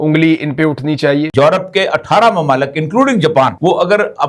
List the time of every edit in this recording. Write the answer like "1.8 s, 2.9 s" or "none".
1.3 s

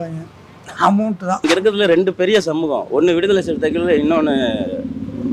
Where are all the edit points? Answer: 1.4 s

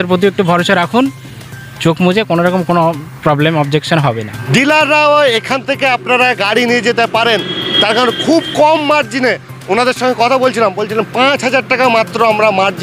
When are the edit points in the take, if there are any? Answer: 4.3 s

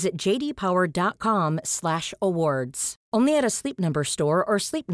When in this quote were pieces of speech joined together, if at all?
none

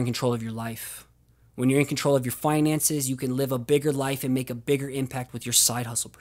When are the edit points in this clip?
5.3 s

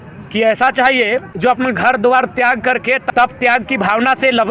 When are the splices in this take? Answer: 1.3 s, 3.0 s

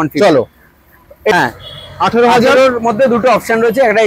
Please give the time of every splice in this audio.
1.3 s

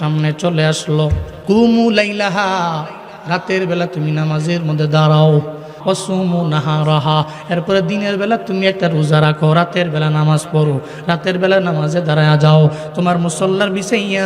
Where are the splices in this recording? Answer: 1.3 s, 5.7 s

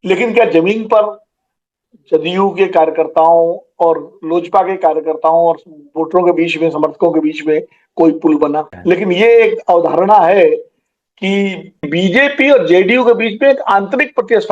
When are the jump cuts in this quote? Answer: 8.7 s, 11.8 s

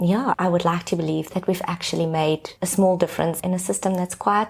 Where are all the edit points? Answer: 1.3 s, 3.4 s

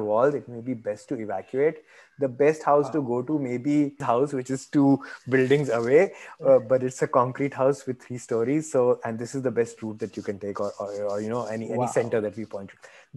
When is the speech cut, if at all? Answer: 4.0 s

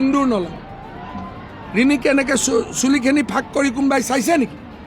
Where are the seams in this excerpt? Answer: none

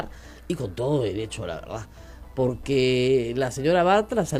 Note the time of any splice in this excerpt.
none

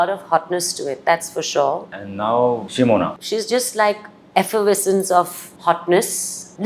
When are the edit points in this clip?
1.8 s, 3.1 s

